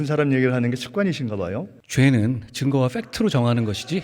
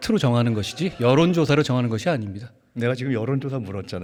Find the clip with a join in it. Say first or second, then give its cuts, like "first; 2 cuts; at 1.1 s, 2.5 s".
first; 1 cut; at 1.8 s